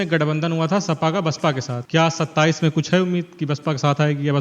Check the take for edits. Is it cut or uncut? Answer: cut